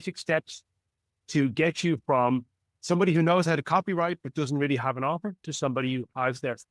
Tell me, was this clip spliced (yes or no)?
no